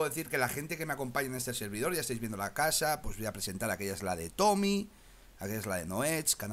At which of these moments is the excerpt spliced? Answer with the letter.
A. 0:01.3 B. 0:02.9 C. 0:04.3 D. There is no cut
C